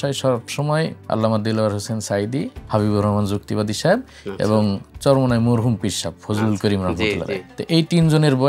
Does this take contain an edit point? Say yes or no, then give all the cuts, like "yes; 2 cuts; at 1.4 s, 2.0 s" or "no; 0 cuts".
yes; 3 cuts; at 1.0 s, 2.6 s, 7.5 s